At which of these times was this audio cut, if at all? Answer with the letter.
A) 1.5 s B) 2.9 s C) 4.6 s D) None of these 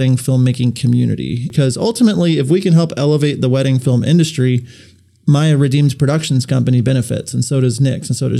A